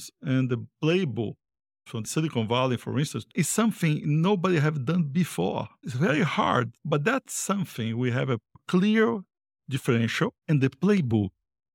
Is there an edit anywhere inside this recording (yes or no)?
yes